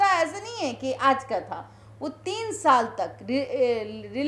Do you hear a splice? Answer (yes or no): no